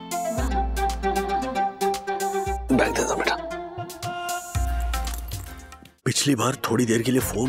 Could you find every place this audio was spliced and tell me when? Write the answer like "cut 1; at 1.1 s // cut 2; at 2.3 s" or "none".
cut 1; at 5.9 s